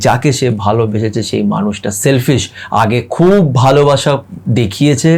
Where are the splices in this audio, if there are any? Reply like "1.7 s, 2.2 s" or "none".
none

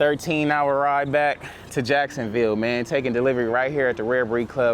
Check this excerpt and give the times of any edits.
none

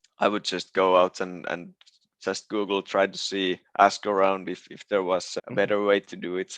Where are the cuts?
5.3 s

